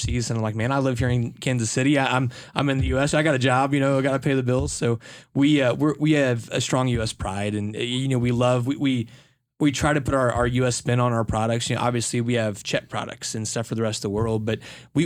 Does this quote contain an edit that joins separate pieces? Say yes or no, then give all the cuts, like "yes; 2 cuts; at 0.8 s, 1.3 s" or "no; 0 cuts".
no; 0 cuts